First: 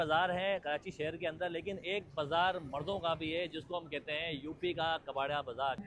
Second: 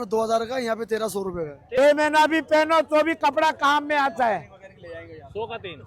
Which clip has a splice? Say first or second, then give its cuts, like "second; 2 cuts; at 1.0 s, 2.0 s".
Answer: second; 1 cut; at 1.8 s